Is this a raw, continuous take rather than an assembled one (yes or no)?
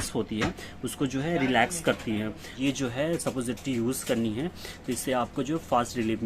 no